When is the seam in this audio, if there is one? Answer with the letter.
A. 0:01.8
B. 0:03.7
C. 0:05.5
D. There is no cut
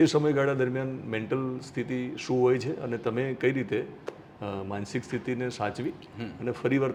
D